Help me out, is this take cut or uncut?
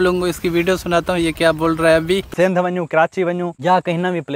cut